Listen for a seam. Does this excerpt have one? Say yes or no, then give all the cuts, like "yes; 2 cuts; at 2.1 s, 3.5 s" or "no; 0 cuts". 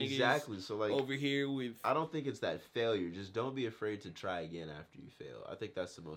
no; 0 cuts